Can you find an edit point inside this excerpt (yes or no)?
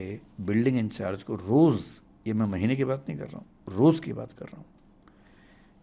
no